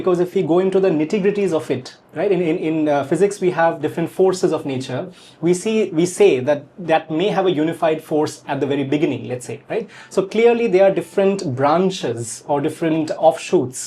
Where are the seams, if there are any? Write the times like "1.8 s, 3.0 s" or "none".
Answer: none